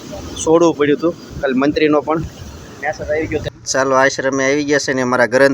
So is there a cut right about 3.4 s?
yes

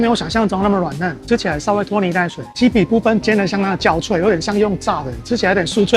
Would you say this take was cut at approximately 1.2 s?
yes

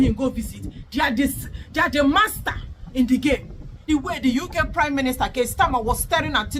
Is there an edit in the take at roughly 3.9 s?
yes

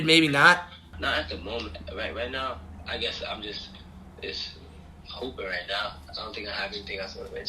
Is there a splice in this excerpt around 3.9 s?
no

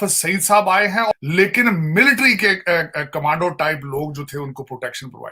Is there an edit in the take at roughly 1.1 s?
yes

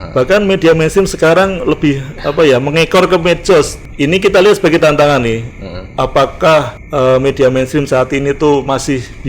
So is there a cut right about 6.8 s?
yes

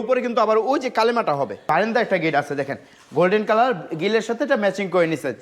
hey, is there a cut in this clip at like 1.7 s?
yes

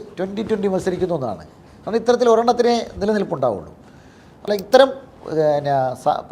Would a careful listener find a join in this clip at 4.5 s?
yes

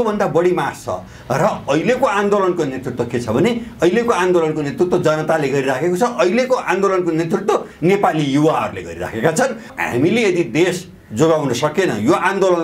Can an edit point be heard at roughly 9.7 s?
yes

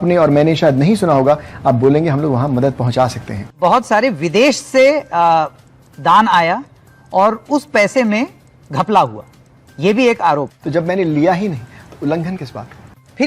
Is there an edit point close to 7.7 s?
no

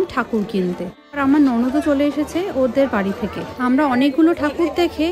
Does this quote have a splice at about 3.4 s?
yes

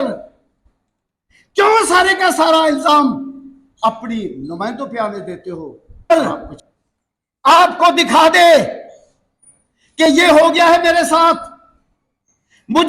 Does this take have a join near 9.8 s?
no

